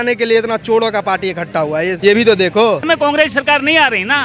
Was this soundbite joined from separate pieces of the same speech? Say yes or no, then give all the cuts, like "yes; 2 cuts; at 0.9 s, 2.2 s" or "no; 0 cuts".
yes; 2 cuts; at 2.0 s, 2.8 s